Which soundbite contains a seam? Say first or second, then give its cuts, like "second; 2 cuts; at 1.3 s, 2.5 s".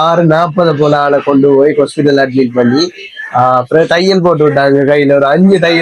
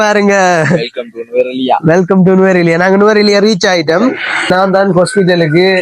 second; 1 cut; at 4.5 s